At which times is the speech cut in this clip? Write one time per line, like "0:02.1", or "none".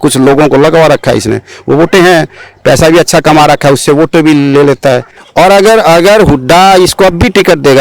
0:05.2